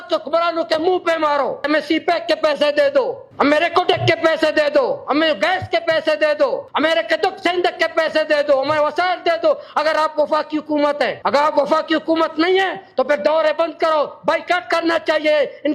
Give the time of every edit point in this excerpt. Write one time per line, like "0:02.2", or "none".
0:01.7
0:03.2
0:06.7
0:11.2